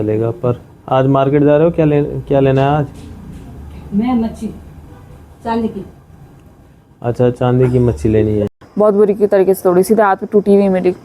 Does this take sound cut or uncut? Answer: cut